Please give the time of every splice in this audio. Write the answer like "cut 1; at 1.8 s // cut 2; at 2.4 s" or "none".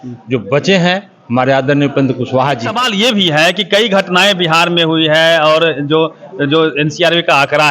cut 1; at 2.8 s